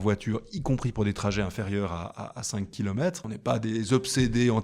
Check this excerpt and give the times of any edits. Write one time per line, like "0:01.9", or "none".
0:03.3